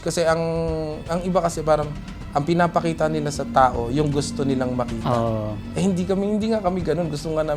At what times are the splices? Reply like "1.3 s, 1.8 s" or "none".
none